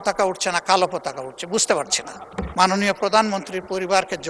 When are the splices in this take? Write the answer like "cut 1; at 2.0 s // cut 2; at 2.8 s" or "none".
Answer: cut 1; at 2.5 s

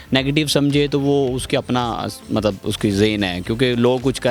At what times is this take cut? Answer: none

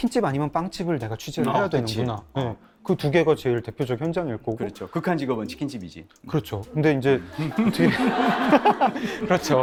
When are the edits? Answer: none

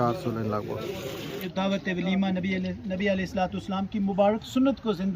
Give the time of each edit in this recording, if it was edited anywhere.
cut 1; at 1.4 s

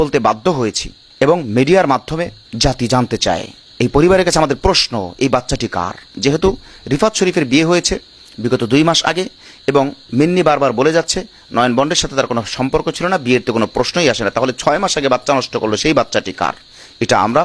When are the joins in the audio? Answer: none

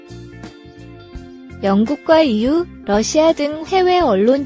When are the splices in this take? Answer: cut 1; at 1.6 s

